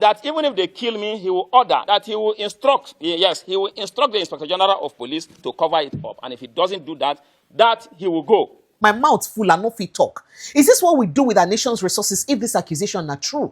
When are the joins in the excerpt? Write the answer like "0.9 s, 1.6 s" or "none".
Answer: 1.8 s, 8.8 s